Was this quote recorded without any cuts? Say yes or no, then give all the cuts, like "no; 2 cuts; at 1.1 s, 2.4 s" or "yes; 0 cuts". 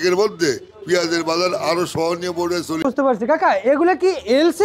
no; 1 cut; at 2.8 s